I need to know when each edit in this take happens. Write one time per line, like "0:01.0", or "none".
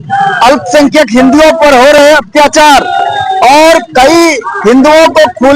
none